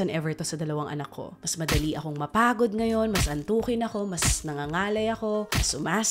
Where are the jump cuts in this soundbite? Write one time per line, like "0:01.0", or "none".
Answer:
0:01.4